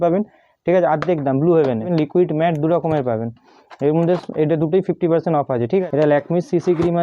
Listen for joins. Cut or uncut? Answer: cut